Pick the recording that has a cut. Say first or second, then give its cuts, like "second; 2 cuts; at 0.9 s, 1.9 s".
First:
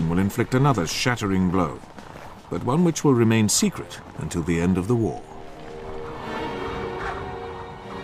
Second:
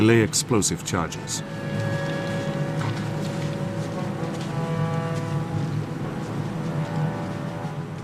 first; 1 cut; at 7.1 s